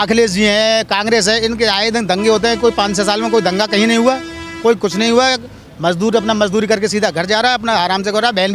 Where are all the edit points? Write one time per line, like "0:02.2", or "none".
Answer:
none